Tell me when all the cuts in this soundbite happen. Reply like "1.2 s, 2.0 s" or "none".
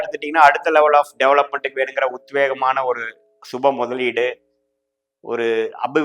none